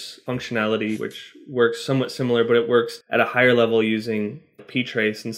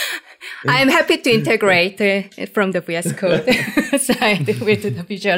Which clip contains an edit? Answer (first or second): first